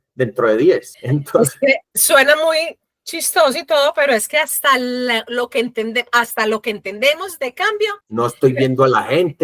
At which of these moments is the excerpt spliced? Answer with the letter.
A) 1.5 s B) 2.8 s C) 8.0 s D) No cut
C